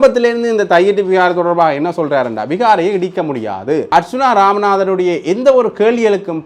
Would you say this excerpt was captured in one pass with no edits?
no; 1 cut; at 3.9 s

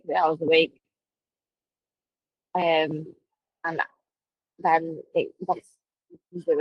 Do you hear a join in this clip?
no; 0 cuts

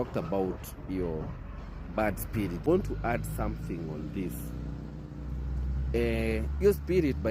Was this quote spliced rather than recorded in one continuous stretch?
yes; 1 cut; at 2.7 s

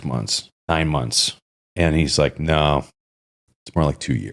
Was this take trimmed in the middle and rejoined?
no; 0 cuts

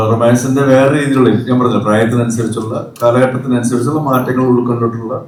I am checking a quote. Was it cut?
no; 0 cuts

